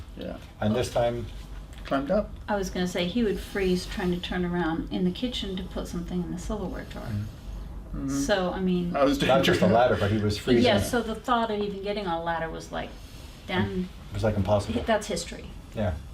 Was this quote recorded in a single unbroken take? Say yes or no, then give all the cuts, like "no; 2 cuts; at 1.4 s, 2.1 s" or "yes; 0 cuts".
yes; 0 cuts